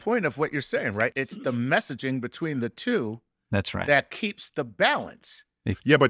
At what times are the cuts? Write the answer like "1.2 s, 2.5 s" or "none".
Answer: 1.1 s